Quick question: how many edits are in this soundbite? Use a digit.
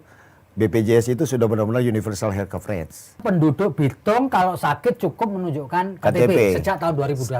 1